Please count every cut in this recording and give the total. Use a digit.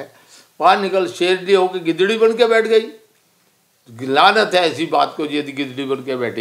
0